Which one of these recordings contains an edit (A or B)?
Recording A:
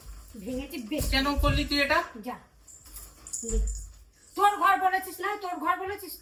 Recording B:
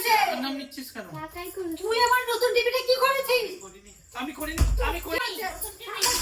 B